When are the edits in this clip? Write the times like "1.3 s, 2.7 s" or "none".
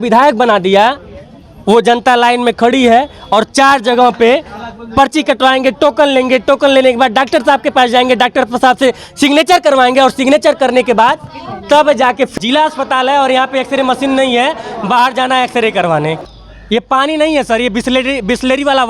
12.3 s, 16.2 s